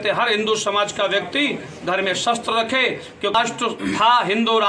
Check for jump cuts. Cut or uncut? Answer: cut